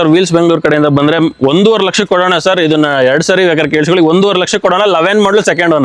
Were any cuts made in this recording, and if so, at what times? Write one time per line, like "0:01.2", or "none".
none